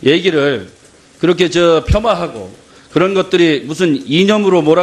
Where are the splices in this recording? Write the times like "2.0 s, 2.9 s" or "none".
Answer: 1.1 s